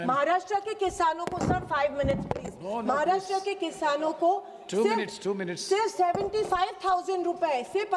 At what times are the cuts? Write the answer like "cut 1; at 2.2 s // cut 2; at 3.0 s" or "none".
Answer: none

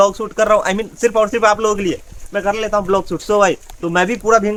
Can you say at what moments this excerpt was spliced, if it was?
none

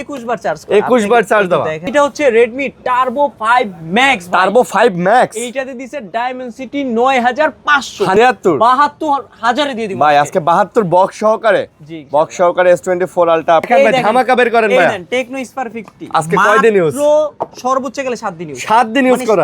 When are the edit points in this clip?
cut 1; at 1.9 s // cut 2; at 8.2 s // cut 3; at 13.7 s

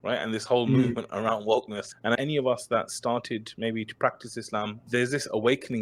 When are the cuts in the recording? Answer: cut 1; at 2.1 s // cut 2; at 4.9 s

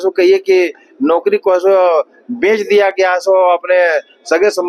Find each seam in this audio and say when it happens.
none

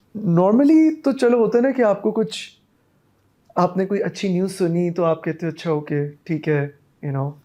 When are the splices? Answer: none

